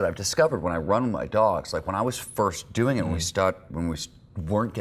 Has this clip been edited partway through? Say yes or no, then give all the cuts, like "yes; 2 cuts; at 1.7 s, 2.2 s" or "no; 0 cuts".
yes; 1 cut; at 3.7 s